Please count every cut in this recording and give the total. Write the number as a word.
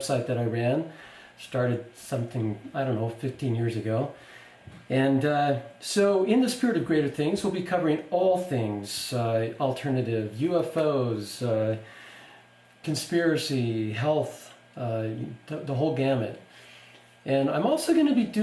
zero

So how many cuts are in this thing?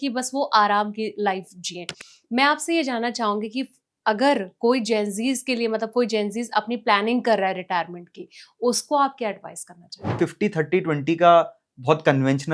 one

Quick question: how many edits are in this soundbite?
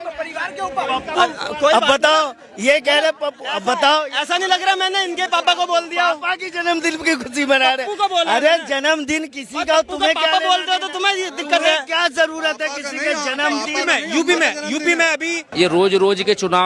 one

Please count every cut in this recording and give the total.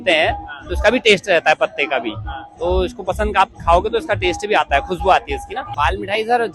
one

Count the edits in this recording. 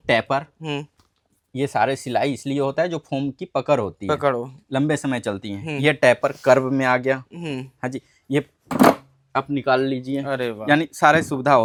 zero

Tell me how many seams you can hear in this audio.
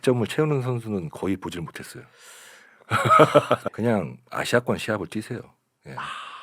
one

